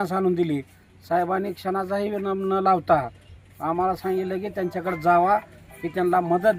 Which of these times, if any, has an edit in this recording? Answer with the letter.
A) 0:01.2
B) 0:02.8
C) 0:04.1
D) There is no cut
D